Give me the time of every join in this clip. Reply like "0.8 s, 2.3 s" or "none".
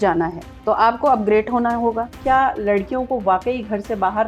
2.1 s